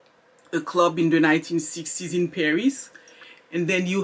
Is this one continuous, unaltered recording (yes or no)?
yes